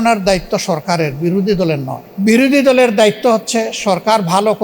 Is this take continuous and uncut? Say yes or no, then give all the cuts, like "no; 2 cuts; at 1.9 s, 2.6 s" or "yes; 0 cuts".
no; 1 cut; at 2.0 s